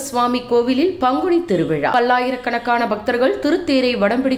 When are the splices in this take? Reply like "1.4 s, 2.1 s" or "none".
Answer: 1.9 s